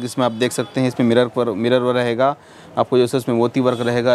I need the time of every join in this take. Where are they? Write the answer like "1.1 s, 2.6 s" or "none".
none